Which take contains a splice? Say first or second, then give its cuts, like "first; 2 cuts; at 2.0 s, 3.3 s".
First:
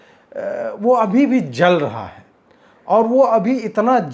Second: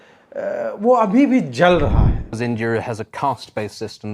second; 1 cut; at 2.3 s